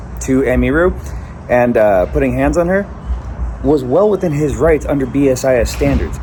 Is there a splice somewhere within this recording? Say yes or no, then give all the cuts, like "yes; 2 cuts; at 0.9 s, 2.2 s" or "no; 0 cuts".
no; 0 cuts